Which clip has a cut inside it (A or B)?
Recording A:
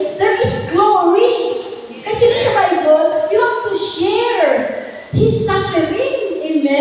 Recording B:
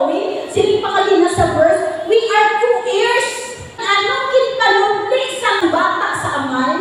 B